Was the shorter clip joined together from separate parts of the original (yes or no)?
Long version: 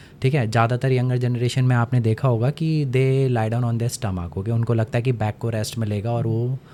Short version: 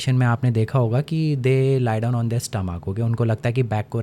no